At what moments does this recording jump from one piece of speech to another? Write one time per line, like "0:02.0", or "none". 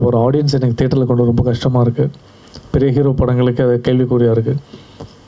none